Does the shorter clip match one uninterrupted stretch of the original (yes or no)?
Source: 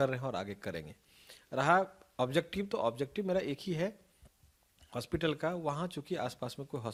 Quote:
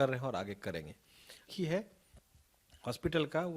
no